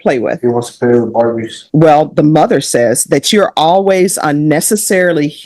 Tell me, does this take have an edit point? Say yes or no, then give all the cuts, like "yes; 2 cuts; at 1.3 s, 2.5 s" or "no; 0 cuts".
yes; 1 cut; at 1.6 s